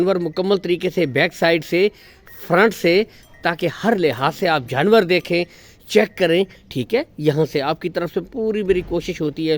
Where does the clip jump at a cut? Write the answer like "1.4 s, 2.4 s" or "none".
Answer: none